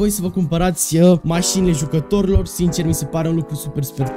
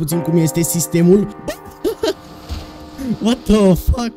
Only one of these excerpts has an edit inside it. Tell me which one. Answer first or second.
second